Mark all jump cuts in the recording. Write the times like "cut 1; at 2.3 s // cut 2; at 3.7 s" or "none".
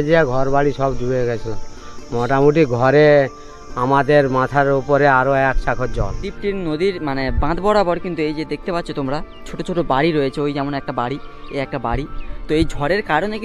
cut 1; at 6.3 s

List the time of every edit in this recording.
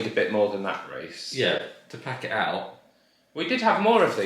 none

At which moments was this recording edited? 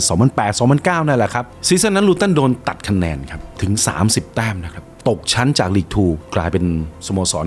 cut 1; at 1.5 s // cut 2; at 5.0 s // cut 3; at 6.2 s

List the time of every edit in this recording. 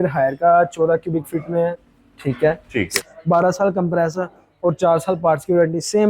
cut 1; at 3.0 s

